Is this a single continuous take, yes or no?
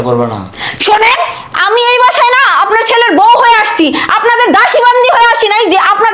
yes